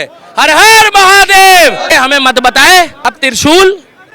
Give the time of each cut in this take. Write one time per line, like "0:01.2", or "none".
0:01.9
0:03.2